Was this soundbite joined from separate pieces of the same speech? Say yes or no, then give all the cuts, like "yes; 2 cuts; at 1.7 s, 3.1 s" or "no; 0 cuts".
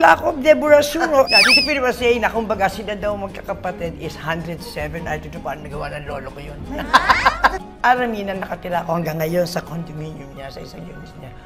yes; 2 cuts; at 1.3 s, 7.5 s